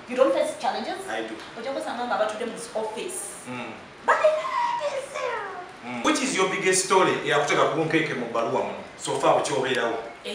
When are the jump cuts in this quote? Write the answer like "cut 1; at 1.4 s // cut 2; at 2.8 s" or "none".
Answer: cut 1; at 6.0 s